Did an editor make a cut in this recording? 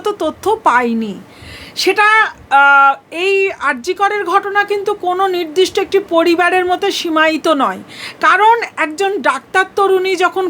no; 0 cuts

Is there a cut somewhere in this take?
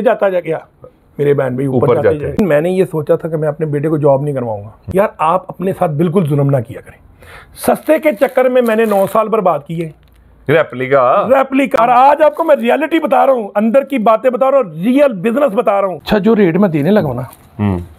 yes; 4 cuts; at 2.4 s, 4.7 s, 11.8 s, 16.0 s

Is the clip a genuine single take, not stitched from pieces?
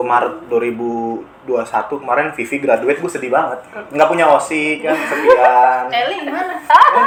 yes; 0 cuts

